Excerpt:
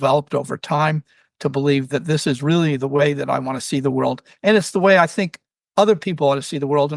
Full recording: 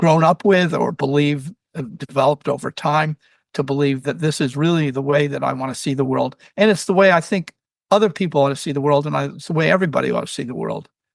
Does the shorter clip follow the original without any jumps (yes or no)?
yes